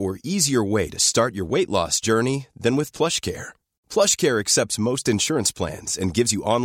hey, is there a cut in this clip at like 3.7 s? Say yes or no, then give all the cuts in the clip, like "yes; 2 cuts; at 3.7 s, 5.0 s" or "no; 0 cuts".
no; 0 cuts